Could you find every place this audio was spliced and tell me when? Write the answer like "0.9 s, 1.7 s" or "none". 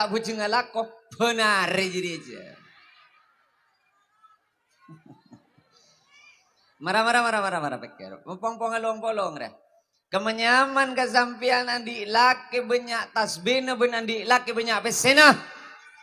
none